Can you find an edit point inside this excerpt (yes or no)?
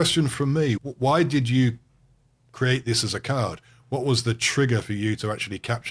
no